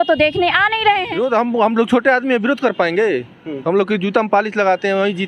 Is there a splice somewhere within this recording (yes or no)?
yes